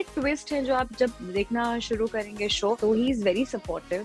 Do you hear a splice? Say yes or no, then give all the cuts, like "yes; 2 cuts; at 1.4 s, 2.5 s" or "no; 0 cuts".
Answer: yes; 1 cut; at 2.8 s